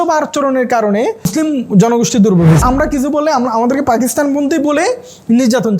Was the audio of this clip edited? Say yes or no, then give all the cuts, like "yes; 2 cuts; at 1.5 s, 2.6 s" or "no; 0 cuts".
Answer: yes; 2 cuts; at 1.3 s, 2.6 s